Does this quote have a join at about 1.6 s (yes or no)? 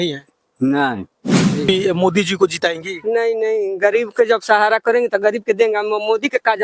yes